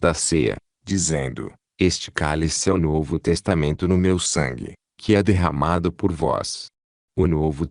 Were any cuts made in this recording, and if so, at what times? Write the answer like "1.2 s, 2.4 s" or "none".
none